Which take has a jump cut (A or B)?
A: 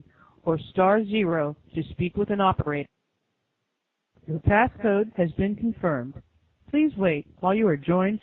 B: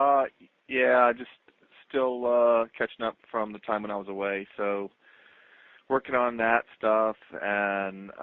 B